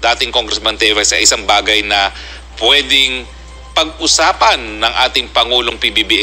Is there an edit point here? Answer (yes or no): no